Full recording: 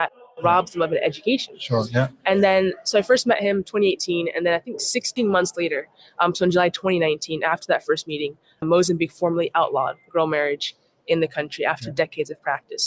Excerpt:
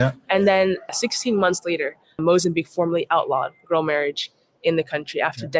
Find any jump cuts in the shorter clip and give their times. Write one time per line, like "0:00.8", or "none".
0:00.8
0:02.0